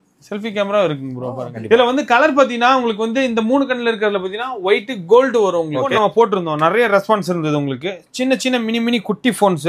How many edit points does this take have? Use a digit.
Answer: 2